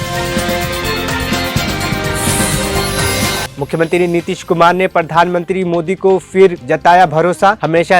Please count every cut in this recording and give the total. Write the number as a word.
one